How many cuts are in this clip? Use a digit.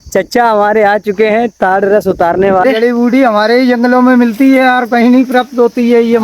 1